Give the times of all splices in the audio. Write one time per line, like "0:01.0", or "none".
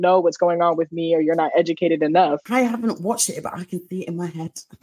0:02.4